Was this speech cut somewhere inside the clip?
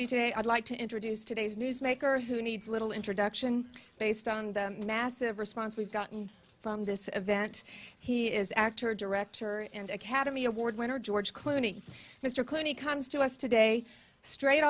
yes; 1 cut; at 6.4 s

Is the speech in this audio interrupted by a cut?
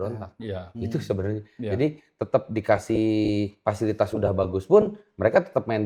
no; 0 cuts

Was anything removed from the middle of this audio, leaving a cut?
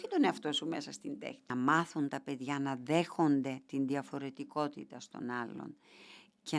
yes; 1 cut; at 1.4 s

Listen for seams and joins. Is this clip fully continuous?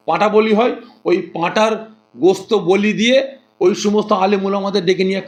yes; 0 cuts

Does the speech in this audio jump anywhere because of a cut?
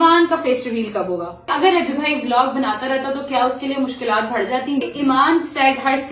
yes; 2 cuts; at 1.5 s, 4.8 s

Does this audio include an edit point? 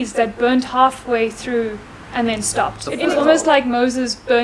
yes; 1 cut; at 3.1 s

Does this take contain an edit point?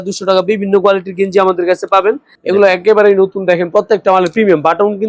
yes; 1 cut; at 2.3 s

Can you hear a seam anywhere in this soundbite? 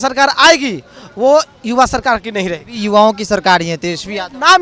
no; 0 cuts

